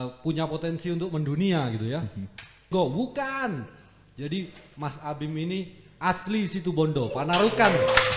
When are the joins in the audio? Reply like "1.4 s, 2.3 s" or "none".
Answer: 2.7 s